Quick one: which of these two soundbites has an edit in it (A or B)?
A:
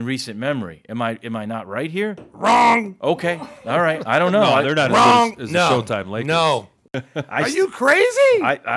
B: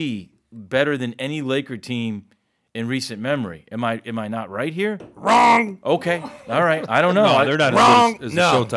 A